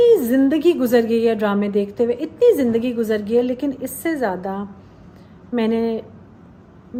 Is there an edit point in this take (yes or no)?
no